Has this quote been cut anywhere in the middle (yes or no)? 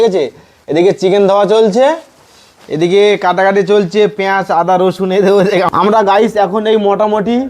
yes